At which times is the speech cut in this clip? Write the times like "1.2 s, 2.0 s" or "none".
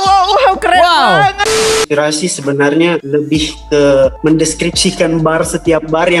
1.7 s, 3.0 s, 4.2 s